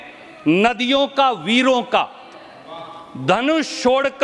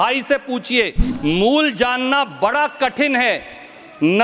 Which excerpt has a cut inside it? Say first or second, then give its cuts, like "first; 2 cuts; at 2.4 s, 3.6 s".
second; 1 cut; at 1.0 s